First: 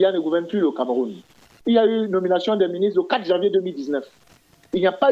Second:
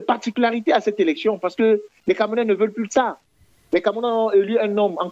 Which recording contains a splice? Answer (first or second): first